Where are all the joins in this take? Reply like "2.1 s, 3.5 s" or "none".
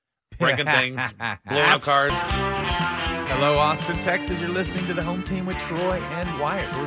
2.1 s